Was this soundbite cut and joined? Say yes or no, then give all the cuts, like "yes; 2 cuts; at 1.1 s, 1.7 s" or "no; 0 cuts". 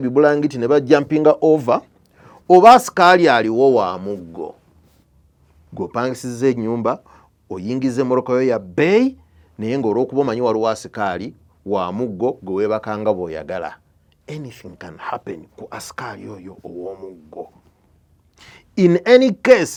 no; 0 cuts